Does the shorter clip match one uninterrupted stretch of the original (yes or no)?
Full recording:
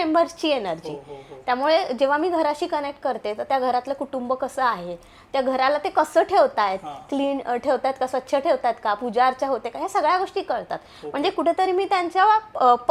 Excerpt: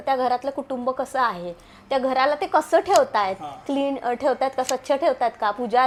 yes